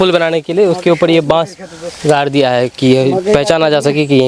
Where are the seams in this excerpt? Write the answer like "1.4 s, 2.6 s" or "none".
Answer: none